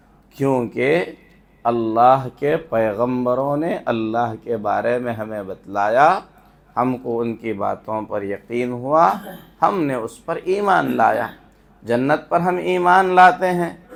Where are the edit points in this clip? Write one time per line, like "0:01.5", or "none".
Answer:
none